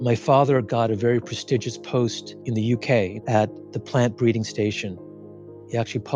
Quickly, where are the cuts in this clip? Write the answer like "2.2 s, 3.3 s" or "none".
3.2 s, 5.4 s